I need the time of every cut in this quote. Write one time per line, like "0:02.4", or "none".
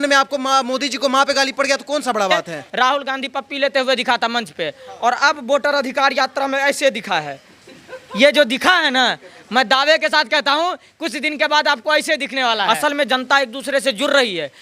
0:02.6
0:12.6